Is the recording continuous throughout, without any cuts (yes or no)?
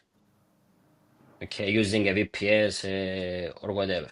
yes